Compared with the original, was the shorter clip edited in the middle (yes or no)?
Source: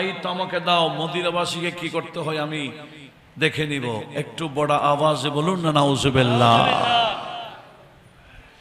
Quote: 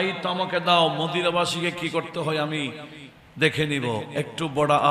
no